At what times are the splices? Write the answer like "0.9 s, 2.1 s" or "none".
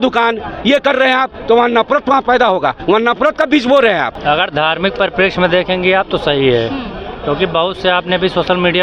4.1 s